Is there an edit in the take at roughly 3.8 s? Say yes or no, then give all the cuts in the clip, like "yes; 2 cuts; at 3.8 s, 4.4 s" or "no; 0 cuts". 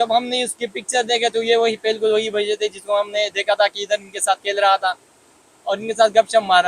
no; 0 cuts